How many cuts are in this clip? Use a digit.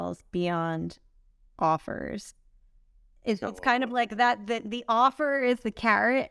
0